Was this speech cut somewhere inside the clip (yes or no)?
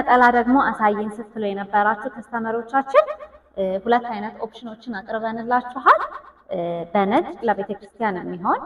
no